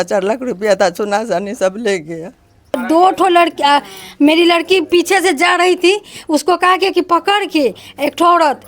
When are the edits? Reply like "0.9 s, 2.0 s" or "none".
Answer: 2.8 s